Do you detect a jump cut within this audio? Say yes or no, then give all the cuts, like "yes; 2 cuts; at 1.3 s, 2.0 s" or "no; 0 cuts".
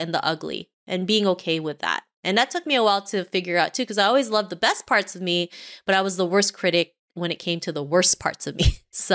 no; 0 cuts